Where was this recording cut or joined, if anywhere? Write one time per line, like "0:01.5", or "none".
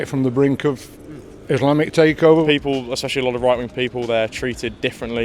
0:02.4